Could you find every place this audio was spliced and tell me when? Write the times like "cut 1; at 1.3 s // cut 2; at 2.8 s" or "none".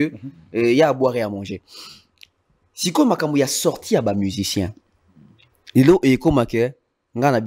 none